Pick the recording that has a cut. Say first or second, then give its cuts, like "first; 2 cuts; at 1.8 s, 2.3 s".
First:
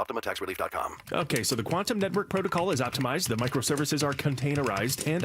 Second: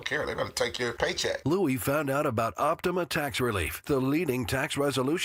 first; 1 cut; at 1.0 s